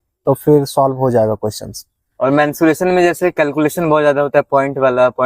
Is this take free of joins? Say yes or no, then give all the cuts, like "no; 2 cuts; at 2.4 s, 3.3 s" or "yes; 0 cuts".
yes; 0 cuts